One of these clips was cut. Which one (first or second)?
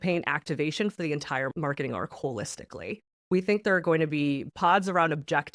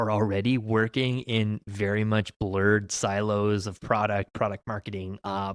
first